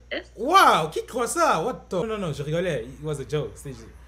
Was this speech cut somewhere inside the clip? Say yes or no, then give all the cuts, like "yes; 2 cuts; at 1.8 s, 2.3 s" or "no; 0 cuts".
yes; 1 cut; at 2.0 s